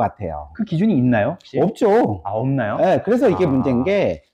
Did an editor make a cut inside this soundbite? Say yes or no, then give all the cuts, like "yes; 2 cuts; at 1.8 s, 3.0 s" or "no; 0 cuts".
no; 0 cuts